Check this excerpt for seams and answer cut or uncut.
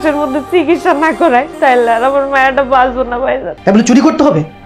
cut